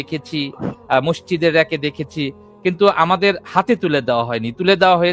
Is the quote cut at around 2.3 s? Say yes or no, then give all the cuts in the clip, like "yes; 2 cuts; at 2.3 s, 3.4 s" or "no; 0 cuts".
no; 0 cuts